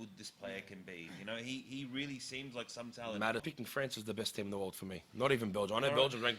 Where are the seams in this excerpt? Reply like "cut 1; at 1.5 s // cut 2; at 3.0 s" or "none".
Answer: cut 1; at 3.5 s